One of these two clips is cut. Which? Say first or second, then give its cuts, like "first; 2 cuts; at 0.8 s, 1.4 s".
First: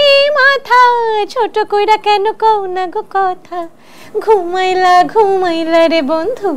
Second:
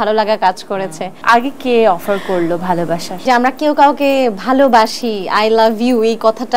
second; 2 cuts; at 1.1 s, 3.2 s